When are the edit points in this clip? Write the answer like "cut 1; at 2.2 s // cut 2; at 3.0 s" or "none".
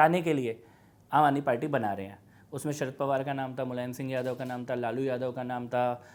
none